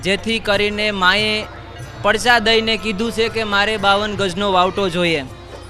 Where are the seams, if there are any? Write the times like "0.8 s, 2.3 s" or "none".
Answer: none